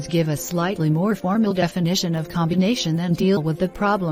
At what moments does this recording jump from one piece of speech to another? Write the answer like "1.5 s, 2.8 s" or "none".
2.8 s